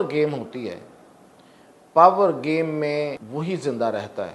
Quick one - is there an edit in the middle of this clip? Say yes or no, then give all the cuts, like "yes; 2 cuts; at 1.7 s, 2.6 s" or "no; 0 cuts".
yes; 1 cut; at 3.2 s